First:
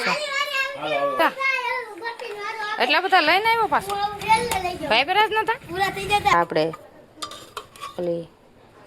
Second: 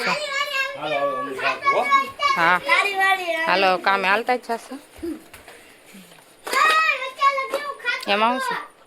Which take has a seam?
first; 2 cuts; at 1.2 s, 6.3 s

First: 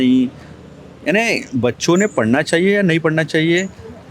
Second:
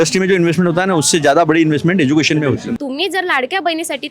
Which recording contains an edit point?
second; 1 cut; at 2.8 s

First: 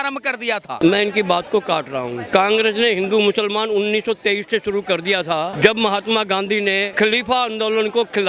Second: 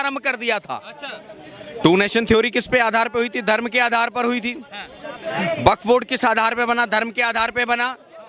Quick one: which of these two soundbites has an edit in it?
first; 4 cuts; at 0.8 s, 2.2 s, 5.5 s, 6.9 s

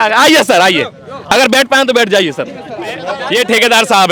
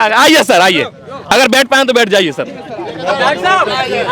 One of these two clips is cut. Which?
first; 1 cut; at 3.1 s

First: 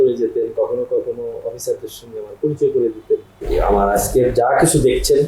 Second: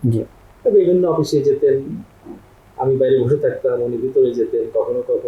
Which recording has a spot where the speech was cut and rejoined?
first; 1 cut; at 3.4 s

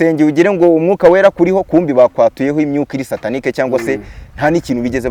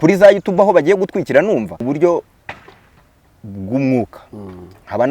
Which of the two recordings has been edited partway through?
second; 1 cut; at 1.8 s

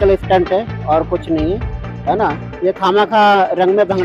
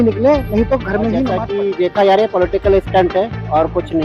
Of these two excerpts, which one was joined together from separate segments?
second; 1 cut; at 1.4 s

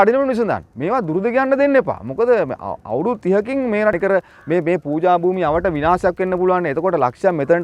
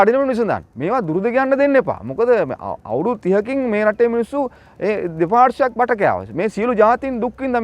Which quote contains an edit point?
first; 1 cut; at 3.9 s

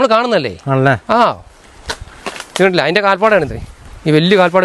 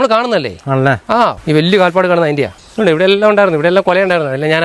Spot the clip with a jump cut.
second; 2 cuts; at 1.4 s, 2.6 s

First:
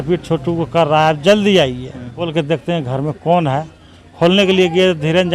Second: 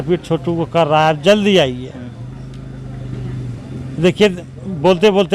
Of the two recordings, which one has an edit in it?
first; 1 cut; at 2.3 s

